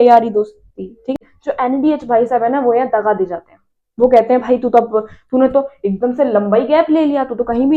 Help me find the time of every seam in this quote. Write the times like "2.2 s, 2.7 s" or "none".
1.3 s